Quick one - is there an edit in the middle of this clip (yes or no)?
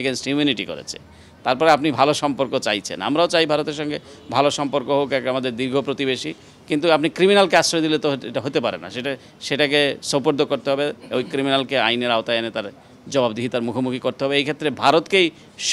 no